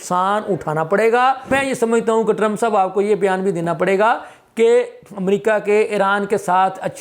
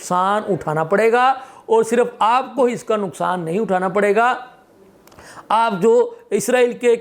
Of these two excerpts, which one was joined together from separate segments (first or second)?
first